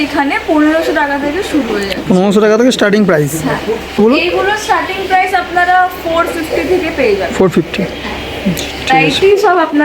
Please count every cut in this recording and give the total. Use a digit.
2